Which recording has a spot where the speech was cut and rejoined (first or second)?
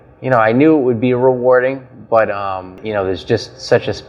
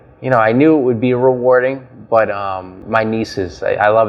first